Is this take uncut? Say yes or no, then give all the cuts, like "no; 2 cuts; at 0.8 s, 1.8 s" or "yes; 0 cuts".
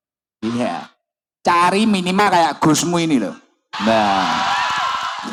yes; 0 cuts